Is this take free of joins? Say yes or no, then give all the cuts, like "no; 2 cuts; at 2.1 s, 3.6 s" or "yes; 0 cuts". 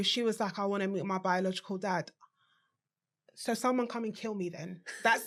yes; 0 cuts